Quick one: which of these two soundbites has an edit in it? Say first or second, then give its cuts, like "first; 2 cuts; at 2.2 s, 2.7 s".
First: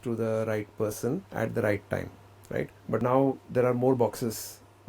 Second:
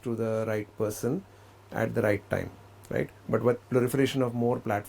first; 2 cuts; at 1.3 s, 3.0 s